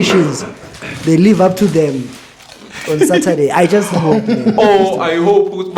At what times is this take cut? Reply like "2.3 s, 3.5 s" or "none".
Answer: none